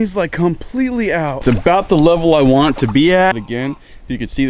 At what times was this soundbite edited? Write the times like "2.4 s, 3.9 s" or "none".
1.4 s, 3.4 s